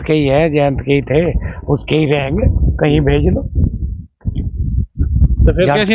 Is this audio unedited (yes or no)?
yes